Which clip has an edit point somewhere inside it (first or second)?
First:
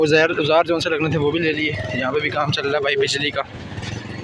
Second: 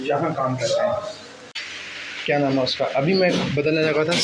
second